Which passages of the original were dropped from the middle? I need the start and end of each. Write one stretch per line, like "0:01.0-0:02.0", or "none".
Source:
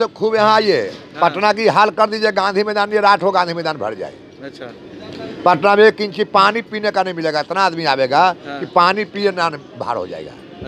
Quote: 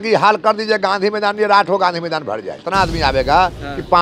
0:04.2-0:07.5